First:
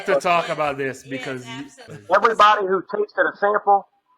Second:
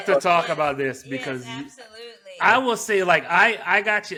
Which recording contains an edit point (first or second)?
first